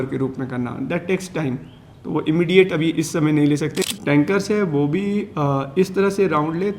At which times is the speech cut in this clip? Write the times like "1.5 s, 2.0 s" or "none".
3.8 s